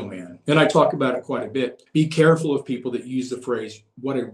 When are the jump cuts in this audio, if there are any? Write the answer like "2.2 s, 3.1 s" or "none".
1.8 s